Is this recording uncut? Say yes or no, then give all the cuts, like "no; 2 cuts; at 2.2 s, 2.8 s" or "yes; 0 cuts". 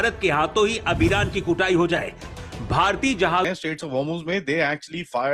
no; 1 cut; at 3.5 s